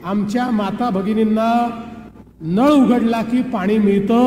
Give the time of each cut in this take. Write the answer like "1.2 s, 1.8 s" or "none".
none